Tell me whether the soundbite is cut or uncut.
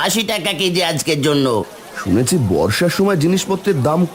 cut